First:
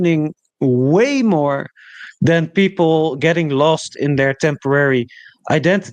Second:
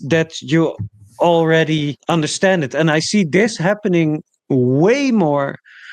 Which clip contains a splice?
second; 1 cut; at 2.0 s

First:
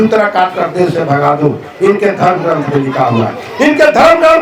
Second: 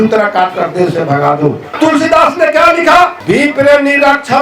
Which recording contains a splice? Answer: second; 2 cuts; at 1.7 s, 3.2 s

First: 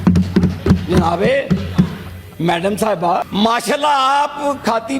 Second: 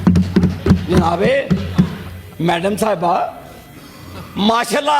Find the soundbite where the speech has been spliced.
first; 1 cut; at 3.3 s

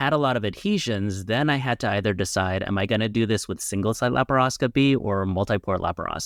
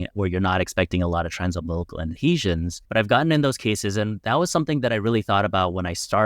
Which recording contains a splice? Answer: second; 2 cuts; at 2.2 s, 2.8 s

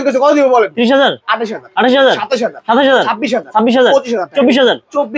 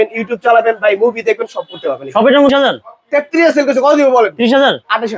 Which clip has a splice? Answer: second; 1 cut; at 2.5 s

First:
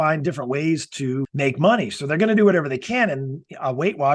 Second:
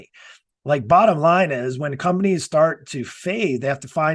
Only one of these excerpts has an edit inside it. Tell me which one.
first; 1 cut; at 1.3 s

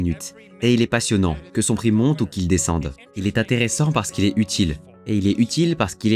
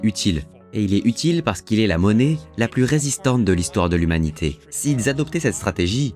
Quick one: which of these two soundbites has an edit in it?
second; 1 cut; at 4.7 s

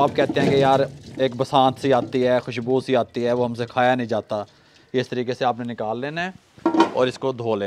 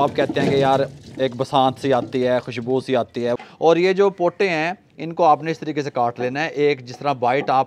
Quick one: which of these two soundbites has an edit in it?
second; 1 cut; at 3.4 s

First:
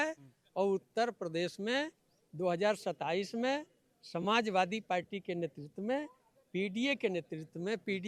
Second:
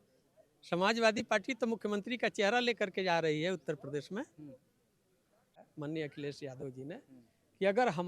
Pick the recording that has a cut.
second; 1 cut; at 5.5 s

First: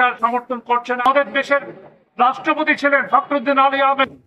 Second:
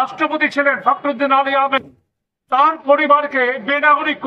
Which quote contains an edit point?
first; 1 cut; at 1.0 s

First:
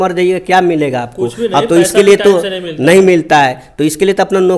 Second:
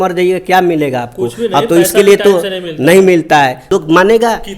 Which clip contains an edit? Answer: second; 1 cut; at 3.7 s

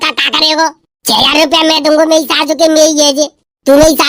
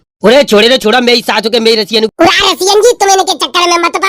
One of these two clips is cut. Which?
second; 1 cut; at 2.1 s

